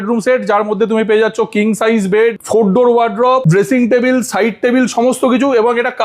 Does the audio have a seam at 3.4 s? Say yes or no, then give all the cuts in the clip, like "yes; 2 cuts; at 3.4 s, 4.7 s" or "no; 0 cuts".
yes; 2 cuts; at 2.4 s, 3.4 s